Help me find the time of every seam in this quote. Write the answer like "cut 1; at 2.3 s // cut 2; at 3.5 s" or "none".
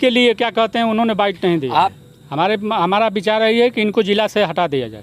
cut 1; at 2.1 s